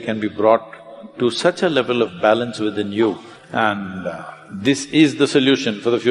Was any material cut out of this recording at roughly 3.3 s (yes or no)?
yes